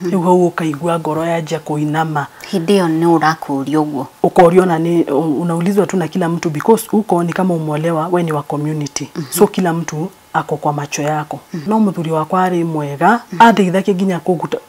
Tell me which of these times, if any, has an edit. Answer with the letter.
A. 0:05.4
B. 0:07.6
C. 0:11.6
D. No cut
C